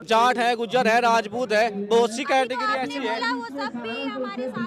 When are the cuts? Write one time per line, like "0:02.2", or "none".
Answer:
none